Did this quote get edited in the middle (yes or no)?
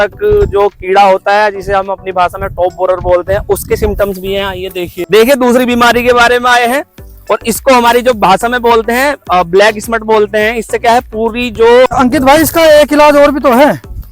yes